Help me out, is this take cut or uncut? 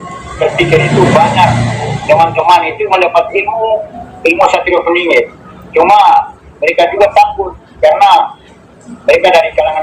uncut